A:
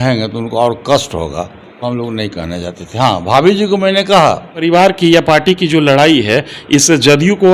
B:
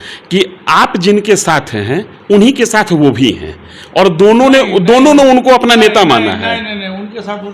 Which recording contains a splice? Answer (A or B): A